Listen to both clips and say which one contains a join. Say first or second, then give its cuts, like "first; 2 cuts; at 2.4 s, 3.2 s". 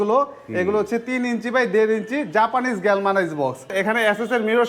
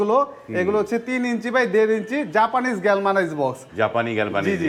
first; 1 cut; at 3.7 s